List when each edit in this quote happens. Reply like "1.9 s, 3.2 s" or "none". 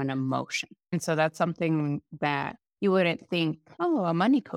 2.6 s, 3.7 s